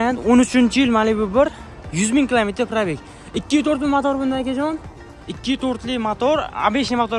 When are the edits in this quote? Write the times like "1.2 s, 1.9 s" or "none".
none